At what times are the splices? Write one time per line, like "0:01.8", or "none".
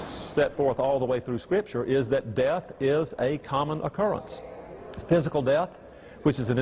none